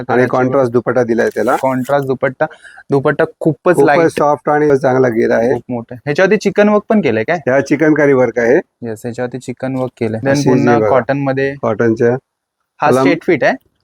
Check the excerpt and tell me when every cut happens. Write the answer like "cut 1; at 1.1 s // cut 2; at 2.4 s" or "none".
cut 1; at 4.7 s // cut 2; at 10.2 s